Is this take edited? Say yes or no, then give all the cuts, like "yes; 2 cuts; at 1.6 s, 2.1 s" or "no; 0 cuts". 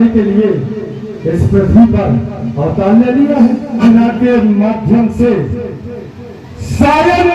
yes; 1 cut; at 3.8 s